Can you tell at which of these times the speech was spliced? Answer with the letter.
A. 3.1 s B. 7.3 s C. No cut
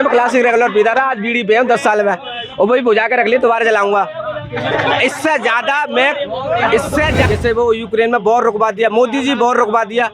B